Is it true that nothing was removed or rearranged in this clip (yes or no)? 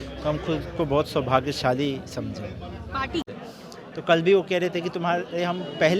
no